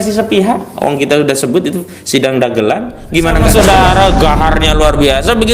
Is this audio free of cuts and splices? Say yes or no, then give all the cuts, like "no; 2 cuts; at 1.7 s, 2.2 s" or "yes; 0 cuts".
no; 1 cut; at 3.5 s